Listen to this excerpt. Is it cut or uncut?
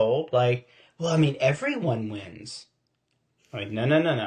uncut